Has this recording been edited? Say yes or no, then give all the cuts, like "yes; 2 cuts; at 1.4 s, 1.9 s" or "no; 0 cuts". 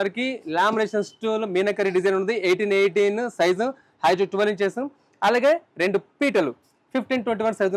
no; 0 cuts